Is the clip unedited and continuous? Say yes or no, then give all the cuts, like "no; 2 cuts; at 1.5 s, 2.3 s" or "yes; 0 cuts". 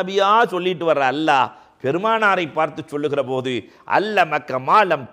yes; 0 cuts